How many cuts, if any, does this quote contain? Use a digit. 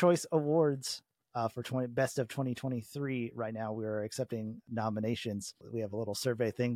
2